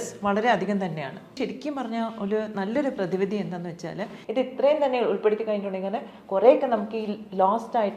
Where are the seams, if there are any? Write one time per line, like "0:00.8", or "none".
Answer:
0:01.3
0:04.1